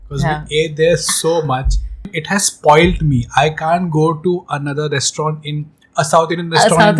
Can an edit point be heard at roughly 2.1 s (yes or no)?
yes